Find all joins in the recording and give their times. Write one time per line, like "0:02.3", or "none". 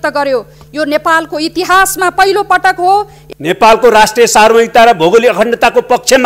0:03.2